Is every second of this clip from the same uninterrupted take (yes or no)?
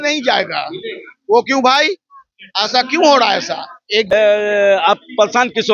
no